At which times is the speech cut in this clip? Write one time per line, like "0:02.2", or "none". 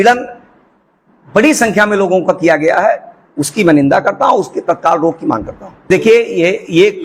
0:05.9